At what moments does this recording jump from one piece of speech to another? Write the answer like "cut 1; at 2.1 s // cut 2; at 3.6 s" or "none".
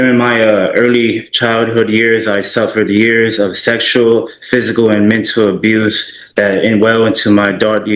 none